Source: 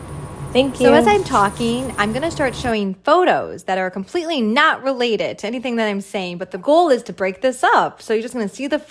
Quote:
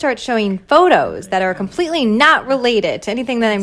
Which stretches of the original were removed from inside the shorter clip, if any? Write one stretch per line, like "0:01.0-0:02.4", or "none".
none

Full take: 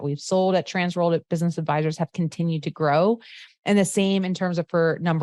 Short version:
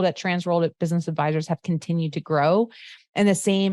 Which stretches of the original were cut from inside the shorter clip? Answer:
none

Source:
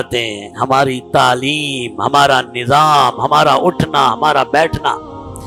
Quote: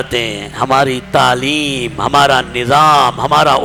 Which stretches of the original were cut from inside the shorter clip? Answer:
none

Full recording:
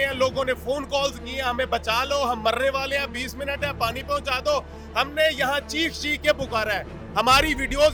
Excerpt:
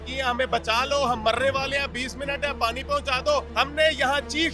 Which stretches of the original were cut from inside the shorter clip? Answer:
0:04.7-0:04.9

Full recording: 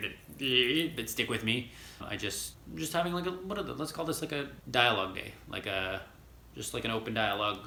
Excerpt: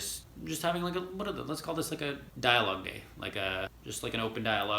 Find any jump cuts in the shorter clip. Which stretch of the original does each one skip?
0:06.1-0:06.5

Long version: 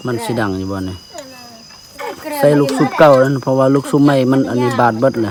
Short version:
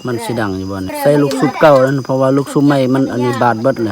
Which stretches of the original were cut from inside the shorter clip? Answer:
0:00.9-0:02.3

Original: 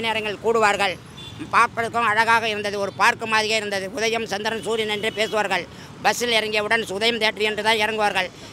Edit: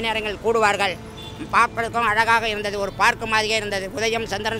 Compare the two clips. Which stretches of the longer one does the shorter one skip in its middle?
none

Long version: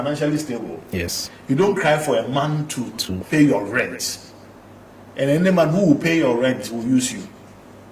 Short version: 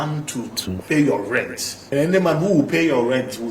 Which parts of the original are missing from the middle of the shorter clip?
0:04.3-0:05.2

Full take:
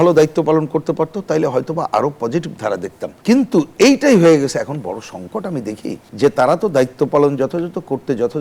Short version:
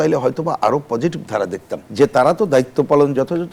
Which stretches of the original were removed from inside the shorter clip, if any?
0:03.1-0:06.0

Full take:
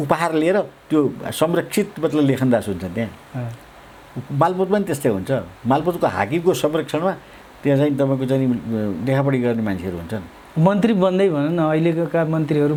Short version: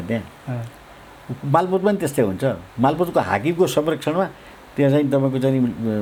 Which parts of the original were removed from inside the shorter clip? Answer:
none

